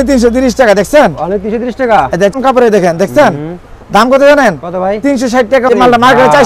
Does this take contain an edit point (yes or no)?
yes